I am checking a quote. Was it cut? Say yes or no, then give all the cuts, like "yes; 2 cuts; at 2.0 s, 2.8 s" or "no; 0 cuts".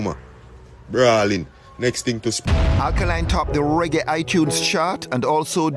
yes; 1 cut; at 2.5 s